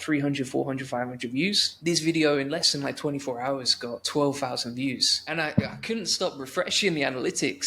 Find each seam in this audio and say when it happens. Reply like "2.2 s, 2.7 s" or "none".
1.7 s, 4.0 s, 5.1 s